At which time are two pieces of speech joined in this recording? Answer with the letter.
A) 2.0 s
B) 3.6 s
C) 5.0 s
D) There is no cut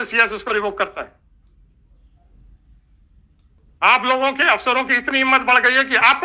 B